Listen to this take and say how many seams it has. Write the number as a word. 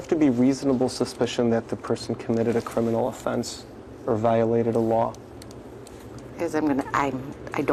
zero